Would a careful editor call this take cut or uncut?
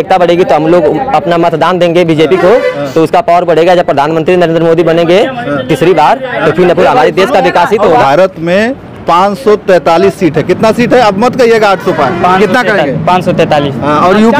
cut